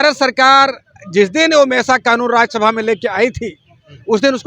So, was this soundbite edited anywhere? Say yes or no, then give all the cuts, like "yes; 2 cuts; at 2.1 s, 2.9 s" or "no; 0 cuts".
no; 0 cuts